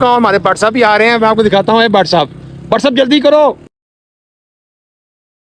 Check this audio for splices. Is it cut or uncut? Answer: uncut